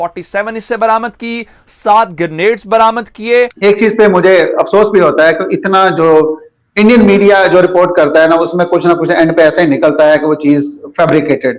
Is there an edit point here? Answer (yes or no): yes